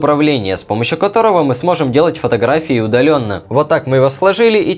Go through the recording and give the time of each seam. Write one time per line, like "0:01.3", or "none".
0:03.3